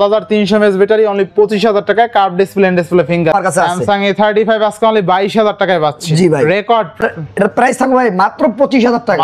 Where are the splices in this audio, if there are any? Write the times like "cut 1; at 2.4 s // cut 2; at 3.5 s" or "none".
cut 1; at 3.3 s // cut 2; at 7.0 s